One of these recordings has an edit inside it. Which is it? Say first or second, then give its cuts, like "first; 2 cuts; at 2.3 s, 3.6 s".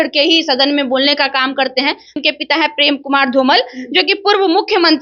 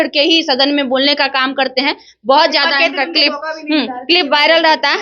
first; 1 cut; at 2.2 s